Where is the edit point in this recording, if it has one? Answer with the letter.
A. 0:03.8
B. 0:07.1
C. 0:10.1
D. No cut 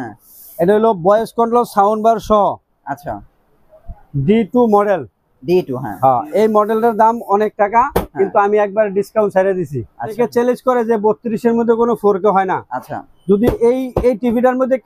C